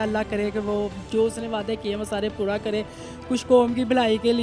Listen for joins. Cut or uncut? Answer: uncut